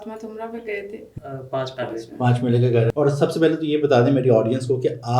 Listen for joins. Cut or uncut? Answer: cut